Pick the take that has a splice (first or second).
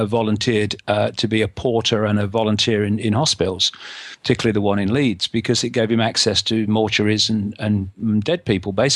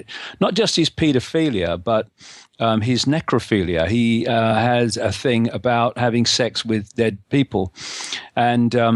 second